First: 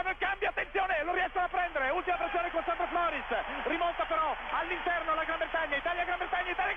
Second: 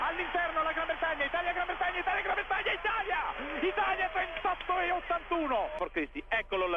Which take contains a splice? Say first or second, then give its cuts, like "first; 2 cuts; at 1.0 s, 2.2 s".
second; 1 cut; at 5.8 s